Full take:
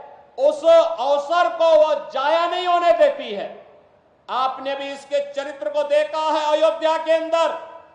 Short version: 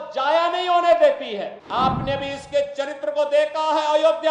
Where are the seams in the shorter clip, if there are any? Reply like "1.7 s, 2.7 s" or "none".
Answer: 1.6 s